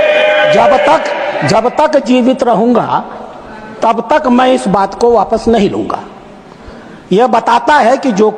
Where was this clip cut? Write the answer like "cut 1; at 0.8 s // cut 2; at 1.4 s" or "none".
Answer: none